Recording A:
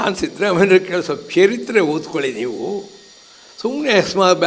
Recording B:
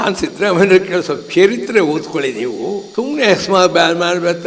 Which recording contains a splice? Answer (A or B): B